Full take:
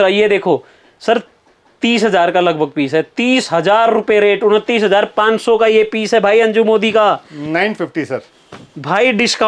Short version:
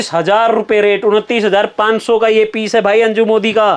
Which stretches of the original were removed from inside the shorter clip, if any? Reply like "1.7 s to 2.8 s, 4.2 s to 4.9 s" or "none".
none